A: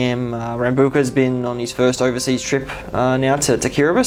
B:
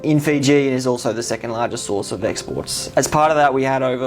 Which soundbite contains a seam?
B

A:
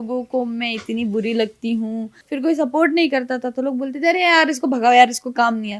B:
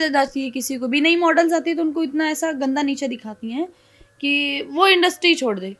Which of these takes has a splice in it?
A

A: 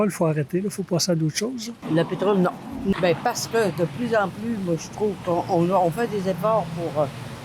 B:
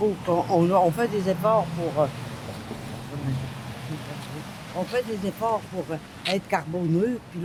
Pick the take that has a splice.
A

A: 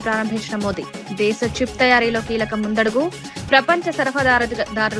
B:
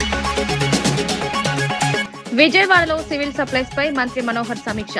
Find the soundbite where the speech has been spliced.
B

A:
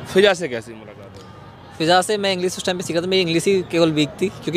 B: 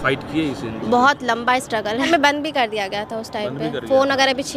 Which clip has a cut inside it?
B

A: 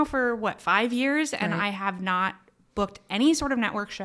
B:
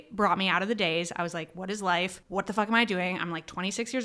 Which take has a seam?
B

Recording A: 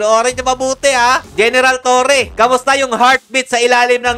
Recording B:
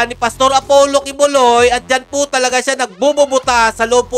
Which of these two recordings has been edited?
A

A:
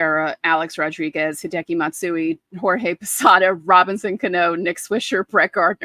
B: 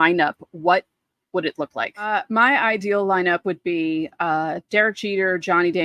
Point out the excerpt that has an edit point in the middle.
B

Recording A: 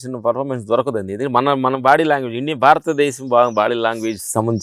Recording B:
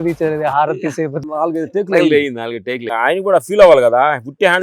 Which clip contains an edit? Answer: B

